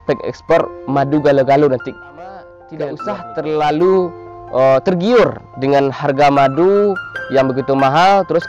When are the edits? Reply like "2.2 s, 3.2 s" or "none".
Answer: 2.6 s